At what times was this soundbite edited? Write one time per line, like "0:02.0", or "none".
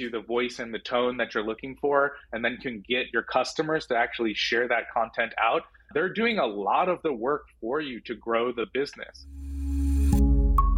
0:09.1